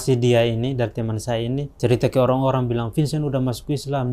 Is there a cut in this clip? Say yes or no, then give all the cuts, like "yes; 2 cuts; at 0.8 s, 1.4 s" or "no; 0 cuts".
yes; 1 cut; at 1.7 s